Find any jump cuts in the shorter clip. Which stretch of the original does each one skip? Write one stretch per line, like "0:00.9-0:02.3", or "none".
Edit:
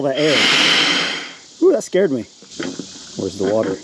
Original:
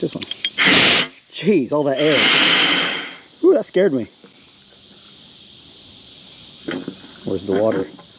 0:04.2-0:06.5